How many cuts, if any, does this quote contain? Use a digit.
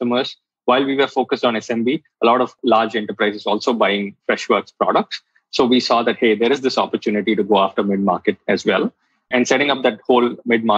3